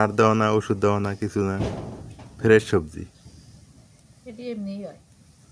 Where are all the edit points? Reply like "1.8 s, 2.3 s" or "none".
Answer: none